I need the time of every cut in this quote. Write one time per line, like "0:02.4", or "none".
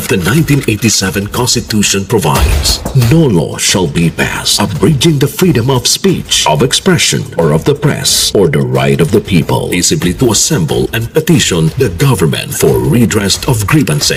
none